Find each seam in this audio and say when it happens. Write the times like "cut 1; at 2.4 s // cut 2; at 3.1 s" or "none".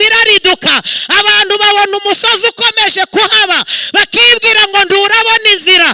none